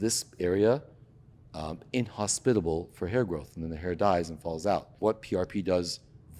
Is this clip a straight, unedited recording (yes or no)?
no